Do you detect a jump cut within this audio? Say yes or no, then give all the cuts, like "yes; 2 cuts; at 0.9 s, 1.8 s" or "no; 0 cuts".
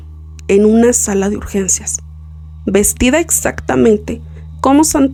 no; 0 cuts